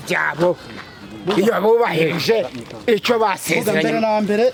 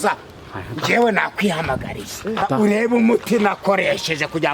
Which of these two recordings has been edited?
second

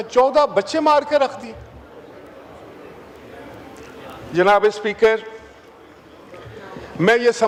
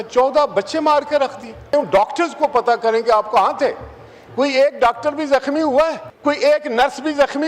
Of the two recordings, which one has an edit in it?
second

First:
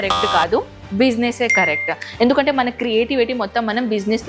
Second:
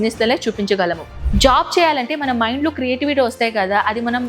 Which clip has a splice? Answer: second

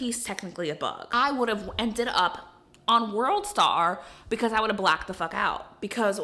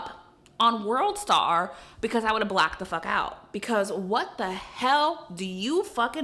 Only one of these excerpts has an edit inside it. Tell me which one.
first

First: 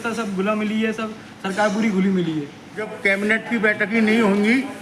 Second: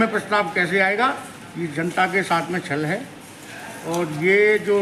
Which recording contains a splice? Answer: first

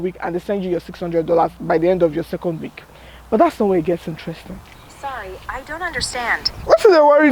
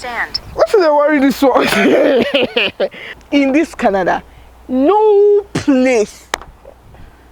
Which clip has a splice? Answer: second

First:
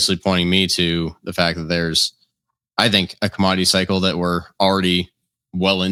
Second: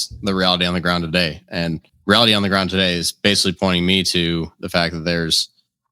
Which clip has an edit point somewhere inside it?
second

